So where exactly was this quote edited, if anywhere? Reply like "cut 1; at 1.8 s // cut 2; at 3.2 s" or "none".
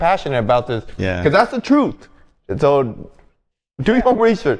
none